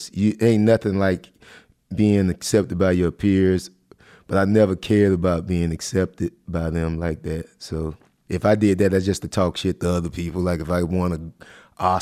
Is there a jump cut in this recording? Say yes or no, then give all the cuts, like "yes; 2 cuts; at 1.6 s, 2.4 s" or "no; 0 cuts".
yes; 1 cut; at 8.1 s